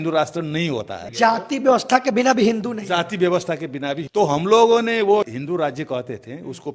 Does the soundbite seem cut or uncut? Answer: cut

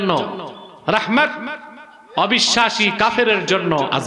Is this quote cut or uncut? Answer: uncut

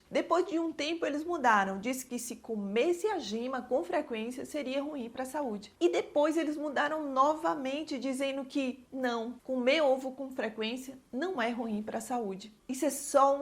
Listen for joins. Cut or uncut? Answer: uncut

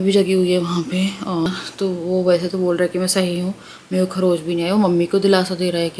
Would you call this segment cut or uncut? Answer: cut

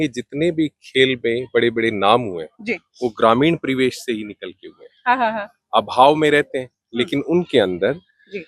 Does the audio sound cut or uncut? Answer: uncut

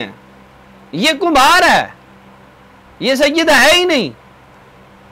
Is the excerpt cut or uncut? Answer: uncut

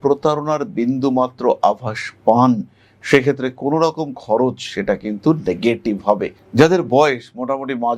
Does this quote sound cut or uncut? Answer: cut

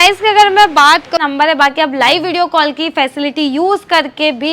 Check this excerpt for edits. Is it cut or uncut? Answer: cut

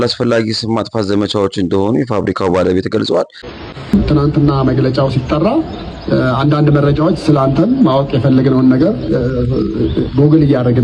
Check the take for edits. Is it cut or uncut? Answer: cut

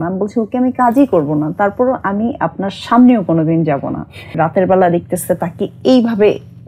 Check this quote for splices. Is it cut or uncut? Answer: cut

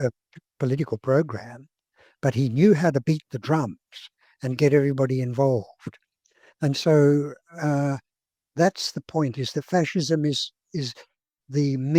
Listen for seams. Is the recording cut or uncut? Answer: uncut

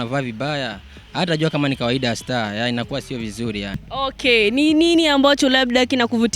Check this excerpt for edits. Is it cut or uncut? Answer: cut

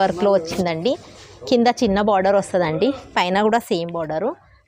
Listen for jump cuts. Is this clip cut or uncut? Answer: uncut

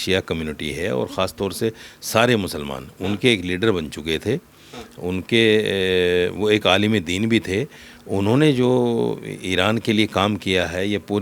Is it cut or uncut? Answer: uncut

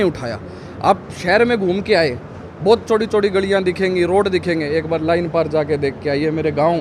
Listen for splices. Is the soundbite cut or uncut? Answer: uncut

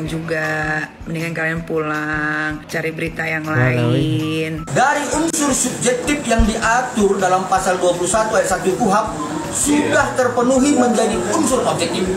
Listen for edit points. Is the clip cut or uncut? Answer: cut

